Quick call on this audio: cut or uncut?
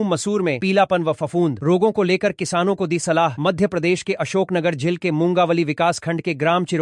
uncut